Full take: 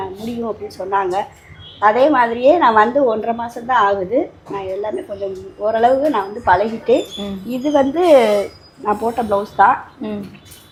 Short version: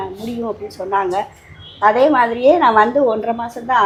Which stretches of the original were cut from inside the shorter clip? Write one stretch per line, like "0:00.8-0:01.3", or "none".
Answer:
none

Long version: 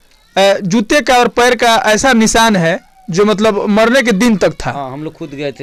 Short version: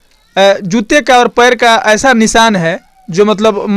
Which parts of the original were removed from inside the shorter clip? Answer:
none

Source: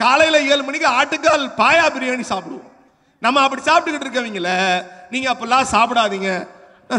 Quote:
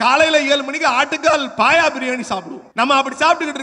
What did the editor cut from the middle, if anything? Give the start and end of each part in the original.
0:02.6-0:03.0

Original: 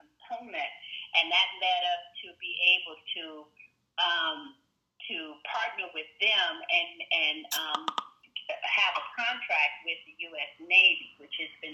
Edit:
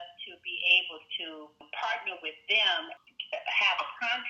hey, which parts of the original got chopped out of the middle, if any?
0:03.6-0:05.4
0:06.6-0:08.1

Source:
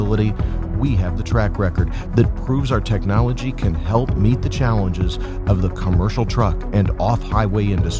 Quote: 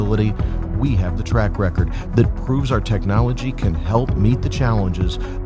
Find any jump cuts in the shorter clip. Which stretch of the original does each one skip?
none

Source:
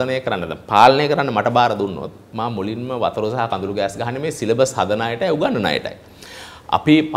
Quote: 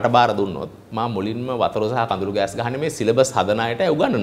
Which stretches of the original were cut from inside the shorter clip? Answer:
none

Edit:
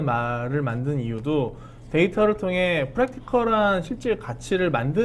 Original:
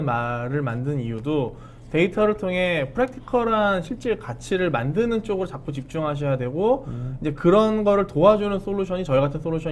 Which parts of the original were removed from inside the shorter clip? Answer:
none

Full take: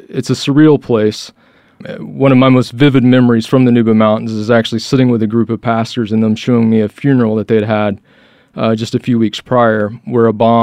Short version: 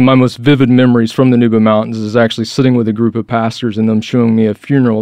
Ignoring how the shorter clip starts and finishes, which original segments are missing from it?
none

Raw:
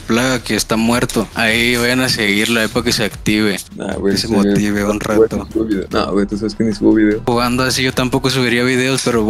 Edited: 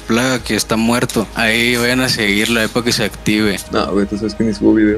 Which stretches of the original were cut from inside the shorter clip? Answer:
0:03.7-0:05.9

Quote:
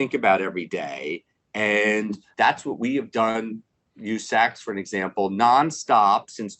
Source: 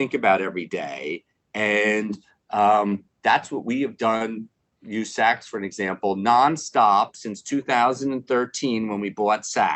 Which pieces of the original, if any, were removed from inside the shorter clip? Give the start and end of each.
0:02.2-0:03.1

